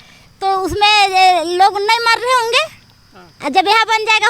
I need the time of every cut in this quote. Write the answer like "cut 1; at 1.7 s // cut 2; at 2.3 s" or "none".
none